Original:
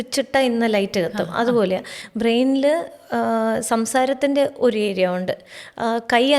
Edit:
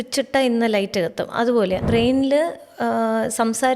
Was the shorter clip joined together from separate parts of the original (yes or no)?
yes